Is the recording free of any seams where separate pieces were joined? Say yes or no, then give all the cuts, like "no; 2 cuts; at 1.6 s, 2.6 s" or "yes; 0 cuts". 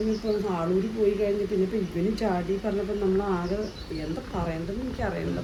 yes; 0 cuts